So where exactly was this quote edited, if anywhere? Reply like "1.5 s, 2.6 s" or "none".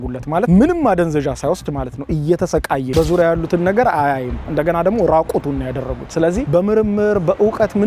2.9 s